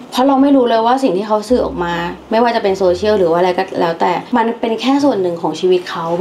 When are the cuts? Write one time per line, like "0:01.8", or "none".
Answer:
0:04.2